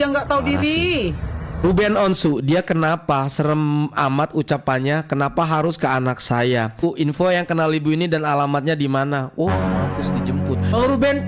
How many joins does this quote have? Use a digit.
2